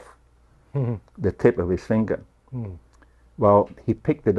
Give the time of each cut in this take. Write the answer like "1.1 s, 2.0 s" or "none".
none

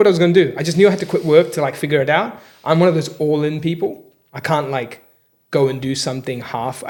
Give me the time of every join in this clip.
none

